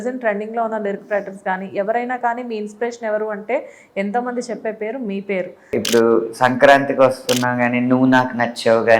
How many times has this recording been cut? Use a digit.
1